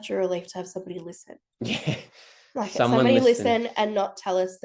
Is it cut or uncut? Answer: uncut